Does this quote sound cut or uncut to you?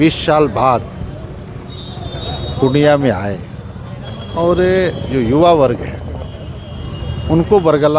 uncut